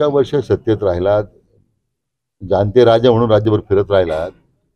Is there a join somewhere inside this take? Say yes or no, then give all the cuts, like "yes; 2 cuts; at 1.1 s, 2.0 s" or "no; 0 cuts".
no; 0 cuts